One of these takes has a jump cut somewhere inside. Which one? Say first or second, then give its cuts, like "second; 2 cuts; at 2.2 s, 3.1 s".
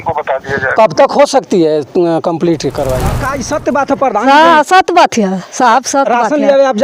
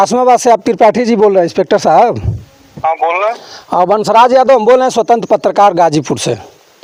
first; 1 cut; at 3.3 s